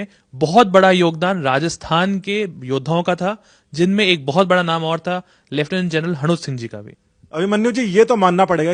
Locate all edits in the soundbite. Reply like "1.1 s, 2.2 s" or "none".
none